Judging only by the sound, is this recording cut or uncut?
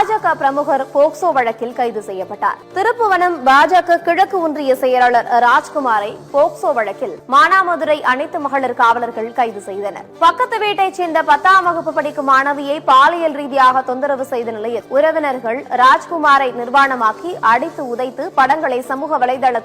cut